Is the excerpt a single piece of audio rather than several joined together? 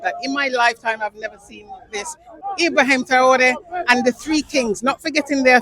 no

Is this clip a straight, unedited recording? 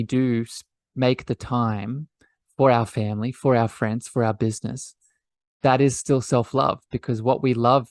yes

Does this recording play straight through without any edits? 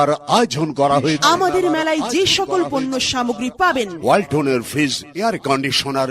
no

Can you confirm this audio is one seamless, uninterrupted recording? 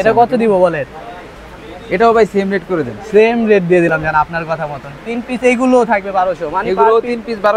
yes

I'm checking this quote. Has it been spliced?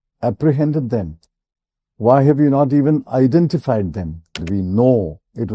yes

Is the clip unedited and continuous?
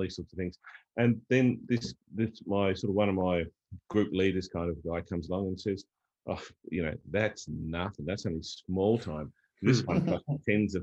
yes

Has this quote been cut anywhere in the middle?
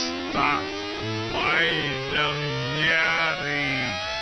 no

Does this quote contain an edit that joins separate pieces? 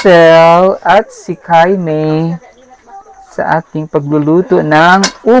no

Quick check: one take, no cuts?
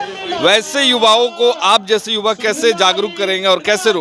yes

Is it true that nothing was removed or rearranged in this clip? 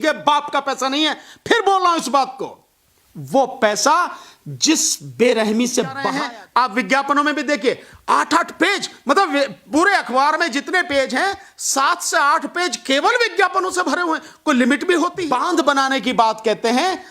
no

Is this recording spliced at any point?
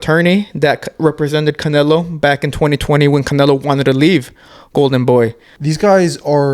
yes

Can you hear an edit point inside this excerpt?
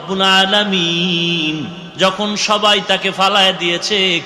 yes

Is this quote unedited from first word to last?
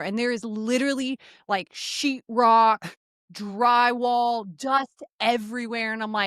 yes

